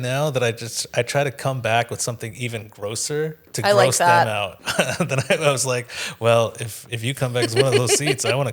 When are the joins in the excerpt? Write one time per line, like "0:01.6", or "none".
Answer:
0:04.6